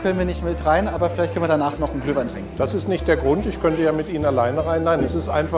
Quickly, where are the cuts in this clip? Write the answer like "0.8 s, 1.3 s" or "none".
none